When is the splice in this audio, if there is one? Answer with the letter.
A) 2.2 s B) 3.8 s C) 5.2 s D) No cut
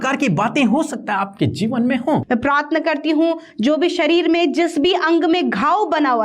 A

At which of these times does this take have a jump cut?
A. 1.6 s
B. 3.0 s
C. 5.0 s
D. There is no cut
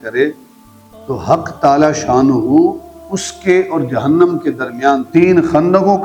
C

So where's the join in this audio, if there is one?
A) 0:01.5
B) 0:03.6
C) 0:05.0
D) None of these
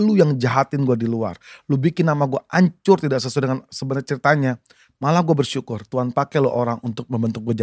D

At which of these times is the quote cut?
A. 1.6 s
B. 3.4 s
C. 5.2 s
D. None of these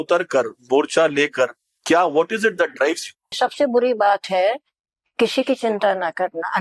B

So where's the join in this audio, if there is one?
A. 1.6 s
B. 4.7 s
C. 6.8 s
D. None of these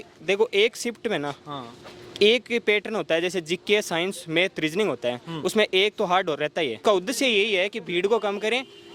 C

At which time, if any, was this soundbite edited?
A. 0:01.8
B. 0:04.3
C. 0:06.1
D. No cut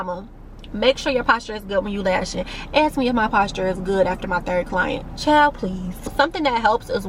D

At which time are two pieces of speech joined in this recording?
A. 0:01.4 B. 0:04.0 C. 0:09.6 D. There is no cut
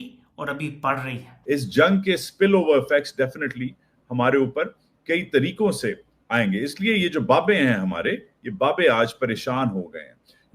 A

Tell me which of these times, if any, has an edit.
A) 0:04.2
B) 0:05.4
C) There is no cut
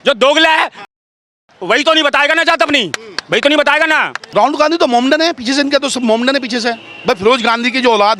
A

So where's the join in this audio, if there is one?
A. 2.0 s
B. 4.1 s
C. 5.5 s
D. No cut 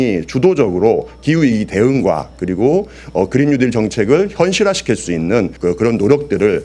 C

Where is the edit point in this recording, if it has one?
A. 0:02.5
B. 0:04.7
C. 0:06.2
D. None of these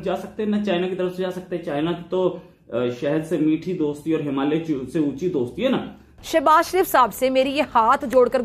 C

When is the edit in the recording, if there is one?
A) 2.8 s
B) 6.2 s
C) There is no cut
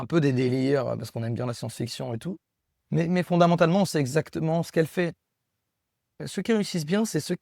B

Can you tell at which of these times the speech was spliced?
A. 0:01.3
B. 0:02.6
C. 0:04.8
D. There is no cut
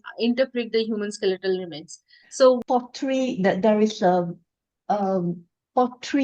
B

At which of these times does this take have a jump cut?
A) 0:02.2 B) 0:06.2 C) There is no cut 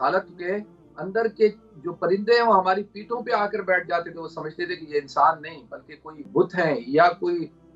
B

